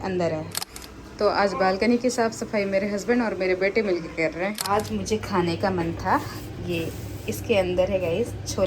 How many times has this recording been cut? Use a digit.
2